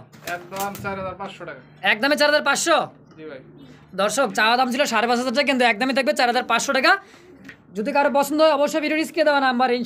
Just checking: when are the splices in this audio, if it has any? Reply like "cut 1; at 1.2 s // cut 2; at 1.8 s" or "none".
none